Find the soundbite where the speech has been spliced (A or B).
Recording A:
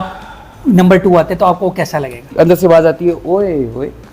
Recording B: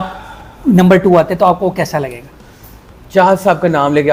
A